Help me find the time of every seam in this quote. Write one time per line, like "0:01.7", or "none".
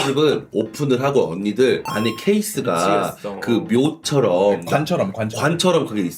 none